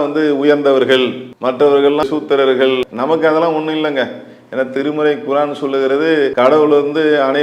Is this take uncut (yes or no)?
no